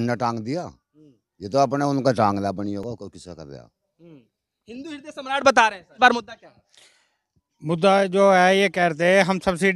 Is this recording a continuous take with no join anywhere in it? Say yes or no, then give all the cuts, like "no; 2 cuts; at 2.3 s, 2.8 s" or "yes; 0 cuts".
yes; 0 cuts